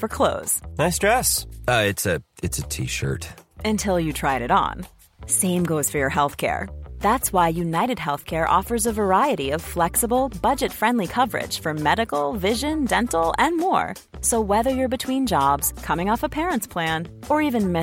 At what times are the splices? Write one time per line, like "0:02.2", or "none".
none